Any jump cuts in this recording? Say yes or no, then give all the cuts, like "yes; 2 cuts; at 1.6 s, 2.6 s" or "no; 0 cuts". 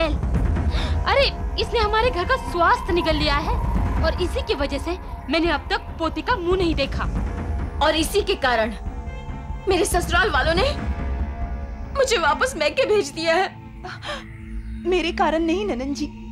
no; 0 cuts